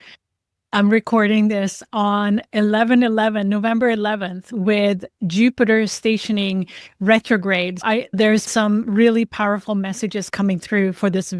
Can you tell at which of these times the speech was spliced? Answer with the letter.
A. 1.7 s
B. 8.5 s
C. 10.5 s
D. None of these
B